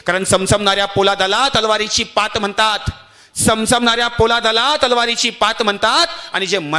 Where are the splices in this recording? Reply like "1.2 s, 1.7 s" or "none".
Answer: none